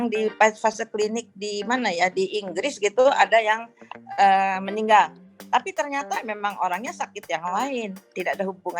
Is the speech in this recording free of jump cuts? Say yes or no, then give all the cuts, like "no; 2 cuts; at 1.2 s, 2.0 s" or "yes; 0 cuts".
yes; 0 cuts